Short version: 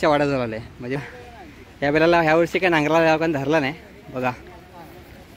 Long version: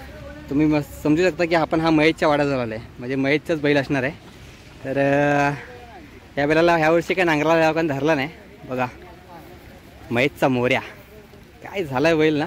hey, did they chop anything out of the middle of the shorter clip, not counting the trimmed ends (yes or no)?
yes